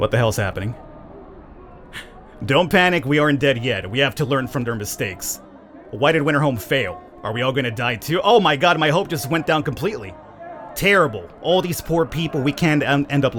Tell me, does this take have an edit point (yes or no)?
no